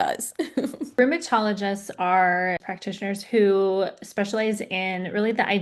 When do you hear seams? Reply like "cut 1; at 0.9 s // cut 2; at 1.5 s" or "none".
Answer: cut 1; at 1.0 s // cut 2; at 2.7 s